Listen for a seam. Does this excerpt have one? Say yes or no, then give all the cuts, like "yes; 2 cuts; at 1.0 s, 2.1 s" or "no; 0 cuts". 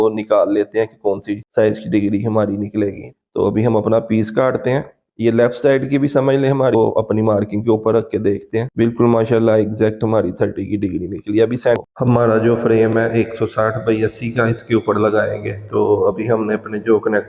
yes; 3 cuts; at 3.1 s, 6.8 s, 11.8 s